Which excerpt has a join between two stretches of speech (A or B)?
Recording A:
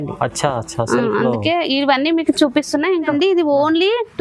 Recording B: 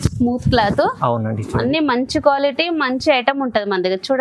A